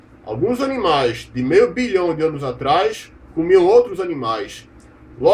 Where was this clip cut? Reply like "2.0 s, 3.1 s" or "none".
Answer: 3.3 s

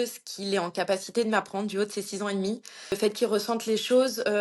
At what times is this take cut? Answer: 3.0 s

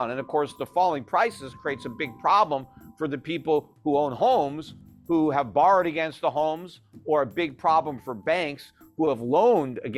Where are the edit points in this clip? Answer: none

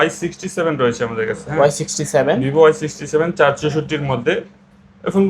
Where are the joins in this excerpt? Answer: none

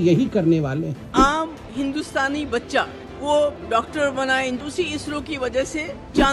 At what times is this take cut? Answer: 1.0 s, 4.6 s

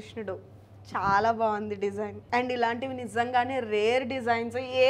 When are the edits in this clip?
2.2 s

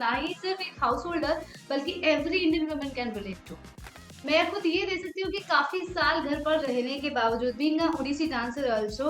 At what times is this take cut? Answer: 4.0 s

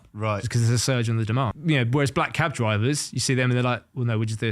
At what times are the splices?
1.6 s

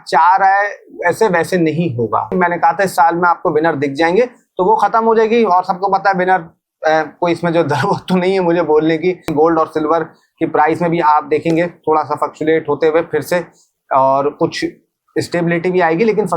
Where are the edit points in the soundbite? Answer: 2.3 s, 9.3 s

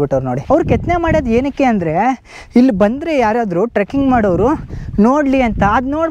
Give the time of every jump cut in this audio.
none

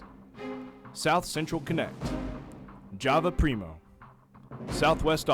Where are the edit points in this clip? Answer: 0.9 s

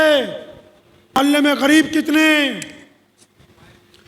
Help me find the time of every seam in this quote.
1.2 s

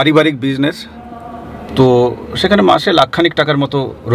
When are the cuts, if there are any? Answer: none

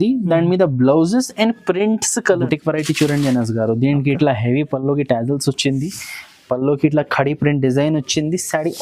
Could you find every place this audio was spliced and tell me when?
2.4 s

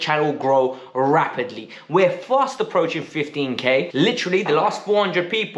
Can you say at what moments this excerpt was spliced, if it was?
3.9 s

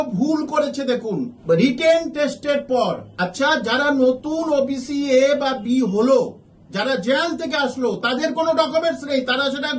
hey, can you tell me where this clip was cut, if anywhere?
1.3 s

